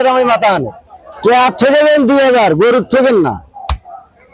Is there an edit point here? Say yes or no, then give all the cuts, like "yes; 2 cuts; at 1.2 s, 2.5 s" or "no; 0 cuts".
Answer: yes; 1 cut; at 1.1 s